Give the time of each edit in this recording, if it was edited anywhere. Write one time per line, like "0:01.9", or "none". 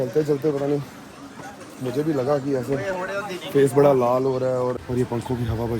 0:04.8